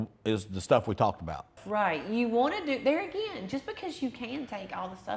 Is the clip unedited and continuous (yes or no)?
no